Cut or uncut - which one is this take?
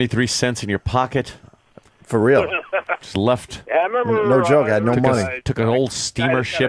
uncut